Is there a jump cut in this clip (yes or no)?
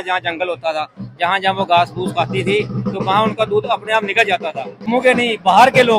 yes